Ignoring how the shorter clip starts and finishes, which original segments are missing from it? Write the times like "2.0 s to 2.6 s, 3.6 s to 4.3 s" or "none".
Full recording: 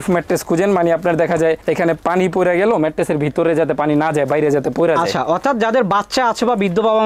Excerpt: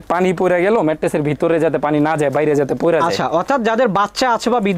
none